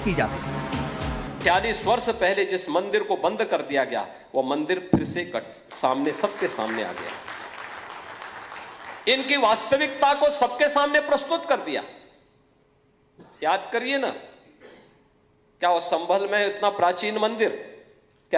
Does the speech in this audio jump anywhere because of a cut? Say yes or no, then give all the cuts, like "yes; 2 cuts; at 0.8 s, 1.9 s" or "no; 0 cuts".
no; 0 cuts